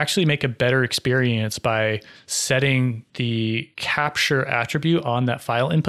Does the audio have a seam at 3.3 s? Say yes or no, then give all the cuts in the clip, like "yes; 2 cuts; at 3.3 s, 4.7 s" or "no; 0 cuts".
yes; 1 cut; at 3.3 s